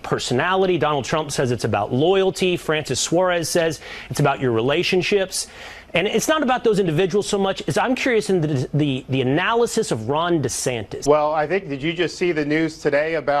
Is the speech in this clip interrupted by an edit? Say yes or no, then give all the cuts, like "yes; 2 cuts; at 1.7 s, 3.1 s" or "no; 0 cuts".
yes; 1 cut; at 10.9 s